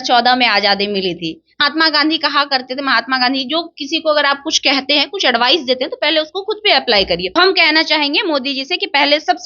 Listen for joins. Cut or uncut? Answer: cut